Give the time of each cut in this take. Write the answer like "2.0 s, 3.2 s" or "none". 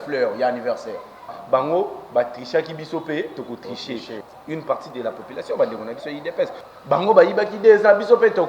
1.4 s, 4.2 s, 6.7 s